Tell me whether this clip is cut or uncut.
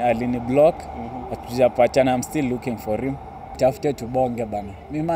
cut